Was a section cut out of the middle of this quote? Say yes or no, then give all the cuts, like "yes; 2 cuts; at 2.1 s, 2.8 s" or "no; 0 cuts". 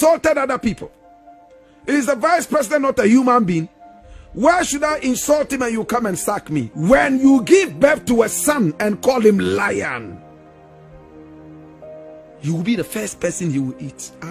yes; 1 cut; at 6.7 s